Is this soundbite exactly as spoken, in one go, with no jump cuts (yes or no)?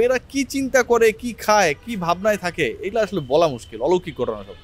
yes